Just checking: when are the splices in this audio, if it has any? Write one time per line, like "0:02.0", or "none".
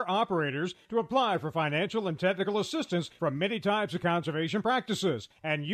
none